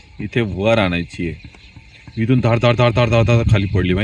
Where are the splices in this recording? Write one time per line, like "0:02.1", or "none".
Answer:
none

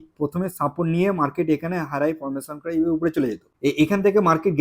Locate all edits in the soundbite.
0:03.5

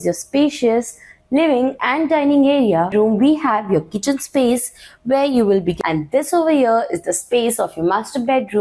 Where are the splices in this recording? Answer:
0:02.9
0:05.8

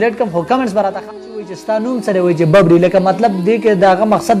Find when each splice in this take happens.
0:01.5

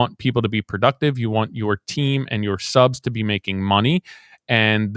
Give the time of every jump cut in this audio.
none

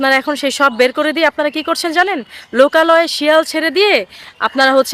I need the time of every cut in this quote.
none

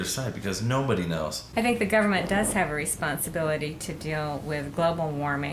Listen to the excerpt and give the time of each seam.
0:01.4

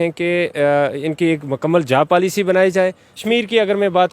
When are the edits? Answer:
0:03.1

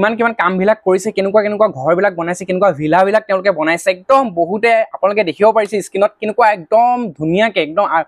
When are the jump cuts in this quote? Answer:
none

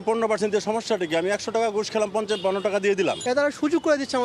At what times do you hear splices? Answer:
0:03.2

